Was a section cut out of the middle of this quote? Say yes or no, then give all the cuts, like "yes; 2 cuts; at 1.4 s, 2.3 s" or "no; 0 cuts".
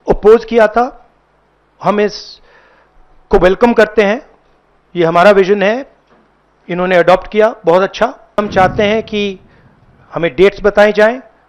yes; 1 cut; at 8.4 s